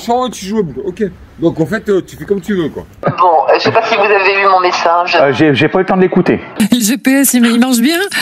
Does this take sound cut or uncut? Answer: cut